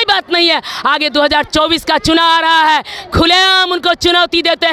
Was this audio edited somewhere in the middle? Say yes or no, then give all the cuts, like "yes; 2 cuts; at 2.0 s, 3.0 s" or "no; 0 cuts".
no; 0 cuts